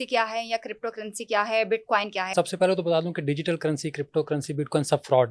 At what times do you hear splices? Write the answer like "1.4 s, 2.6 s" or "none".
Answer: 2.3 s